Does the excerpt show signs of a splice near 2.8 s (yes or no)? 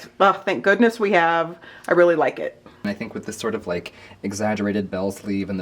yes